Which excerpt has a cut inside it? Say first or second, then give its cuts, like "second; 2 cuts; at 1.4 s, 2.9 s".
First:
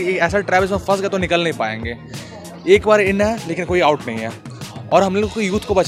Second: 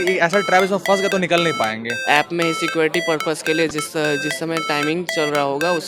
second; 1 cut; at 1.9 s